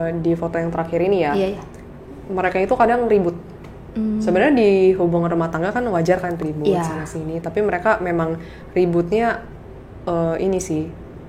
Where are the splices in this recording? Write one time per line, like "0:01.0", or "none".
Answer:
none